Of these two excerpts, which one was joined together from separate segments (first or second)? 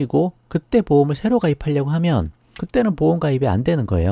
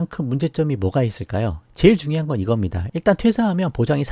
second